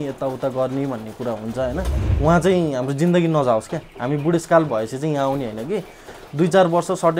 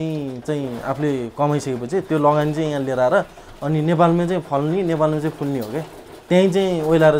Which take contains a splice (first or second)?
first